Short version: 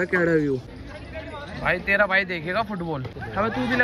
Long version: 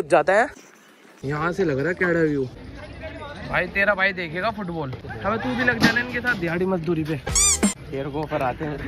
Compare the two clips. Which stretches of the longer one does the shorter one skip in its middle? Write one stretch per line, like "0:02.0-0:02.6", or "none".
none

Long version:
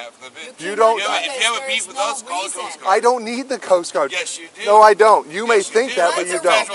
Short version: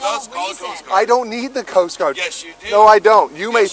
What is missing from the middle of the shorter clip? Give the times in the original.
none

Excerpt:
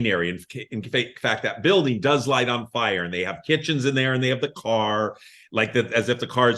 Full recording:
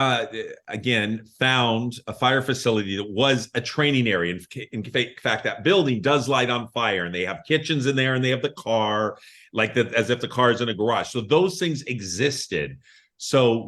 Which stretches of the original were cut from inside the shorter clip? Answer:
none

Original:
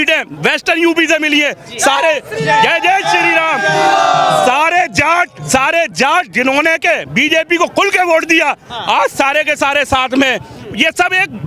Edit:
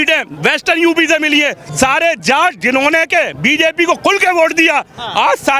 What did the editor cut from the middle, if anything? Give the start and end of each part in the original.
0:01.6-0:05.4

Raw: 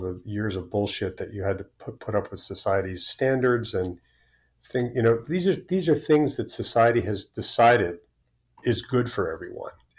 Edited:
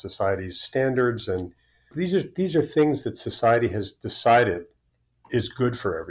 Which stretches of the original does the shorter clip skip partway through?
0:04.4-0:05.2

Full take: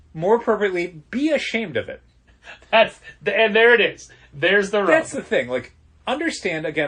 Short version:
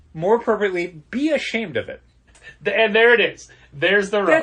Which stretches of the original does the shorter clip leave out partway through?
0:02.5-0:03.1

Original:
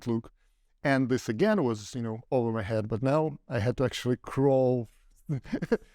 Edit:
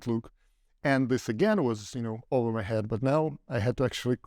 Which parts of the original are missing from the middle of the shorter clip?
none

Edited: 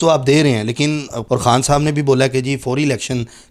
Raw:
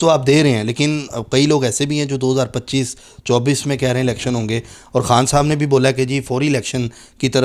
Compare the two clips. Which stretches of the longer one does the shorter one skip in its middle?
0:01.1-0:04.8

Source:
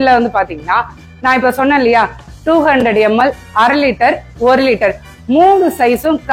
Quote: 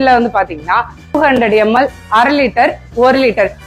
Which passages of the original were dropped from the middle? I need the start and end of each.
0:01.2-0:02.6

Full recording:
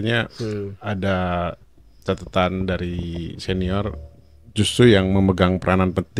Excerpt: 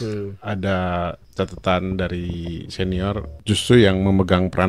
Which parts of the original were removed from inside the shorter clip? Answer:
0:01.6-0:01.9
0:04.0-0:04.4

